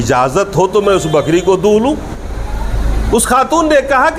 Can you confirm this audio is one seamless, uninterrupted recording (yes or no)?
yes